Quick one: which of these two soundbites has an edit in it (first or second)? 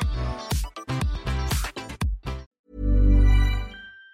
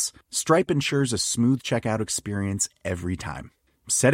first